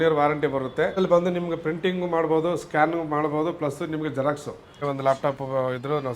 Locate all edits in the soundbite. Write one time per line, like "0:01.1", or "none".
0:00.9
0:04.8